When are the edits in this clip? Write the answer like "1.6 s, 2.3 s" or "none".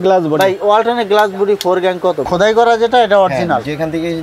2.2 s